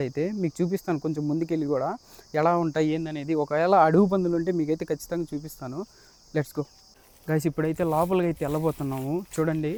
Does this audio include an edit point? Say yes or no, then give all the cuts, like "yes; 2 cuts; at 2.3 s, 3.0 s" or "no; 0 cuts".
no; 0 cuts